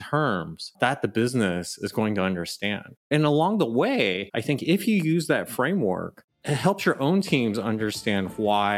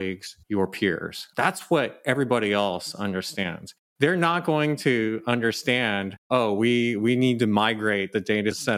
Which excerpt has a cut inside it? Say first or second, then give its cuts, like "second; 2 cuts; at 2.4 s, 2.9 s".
first; 1 cut; at 3.0 s